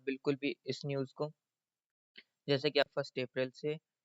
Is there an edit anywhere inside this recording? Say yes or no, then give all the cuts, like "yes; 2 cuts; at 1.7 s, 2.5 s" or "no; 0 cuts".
yes; 1 cut; at 2.9 s